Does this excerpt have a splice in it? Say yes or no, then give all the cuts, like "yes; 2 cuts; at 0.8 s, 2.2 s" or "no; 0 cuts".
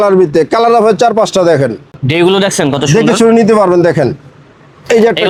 no; 0 cuts